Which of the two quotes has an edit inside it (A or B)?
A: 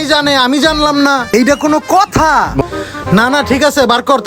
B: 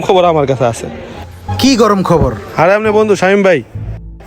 A